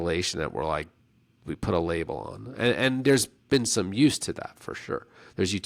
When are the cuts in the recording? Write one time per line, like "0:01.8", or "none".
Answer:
none